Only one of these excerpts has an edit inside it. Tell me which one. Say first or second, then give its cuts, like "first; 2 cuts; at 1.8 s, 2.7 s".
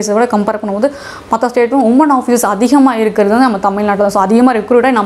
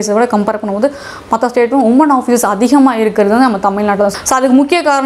second; 1 cut; at 4.1 s